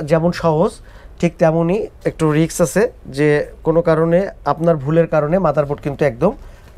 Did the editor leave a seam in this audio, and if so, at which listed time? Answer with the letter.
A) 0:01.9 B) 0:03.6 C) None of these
C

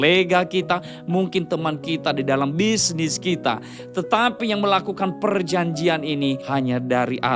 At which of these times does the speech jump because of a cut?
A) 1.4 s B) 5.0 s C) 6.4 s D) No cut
C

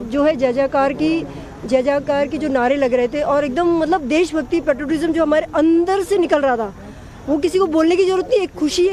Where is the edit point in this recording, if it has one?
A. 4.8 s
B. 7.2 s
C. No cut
A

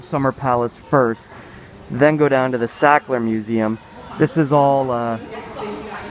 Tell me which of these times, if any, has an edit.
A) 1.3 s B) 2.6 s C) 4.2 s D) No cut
D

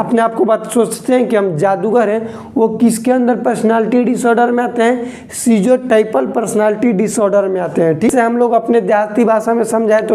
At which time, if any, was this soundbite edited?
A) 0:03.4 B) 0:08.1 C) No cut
B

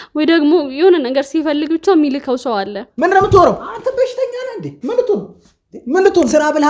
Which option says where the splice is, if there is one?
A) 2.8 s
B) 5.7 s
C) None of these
A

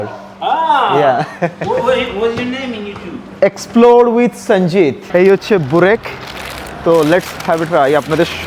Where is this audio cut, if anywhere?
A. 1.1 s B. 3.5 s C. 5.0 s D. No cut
C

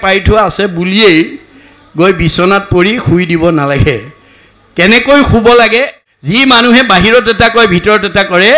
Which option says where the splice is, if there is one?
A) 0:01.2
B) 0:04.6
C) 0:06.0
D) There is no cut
C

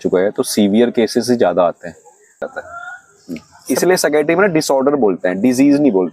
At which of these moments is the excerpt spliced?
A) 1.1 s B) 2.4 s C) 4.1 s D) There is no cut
B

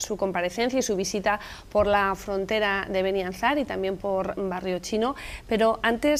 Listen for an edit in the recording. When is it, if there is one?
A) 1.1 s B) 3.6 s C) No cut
B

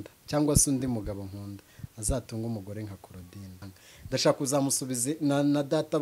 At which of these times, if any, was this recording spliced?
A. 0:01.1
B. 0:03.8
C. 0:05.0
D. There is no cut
B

